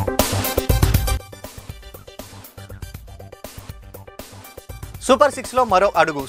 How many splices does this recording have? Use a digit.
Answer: 2